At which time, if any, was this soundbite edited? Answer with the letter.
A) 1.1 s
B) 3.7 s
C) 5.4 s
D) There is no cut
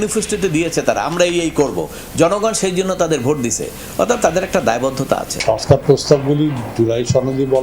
C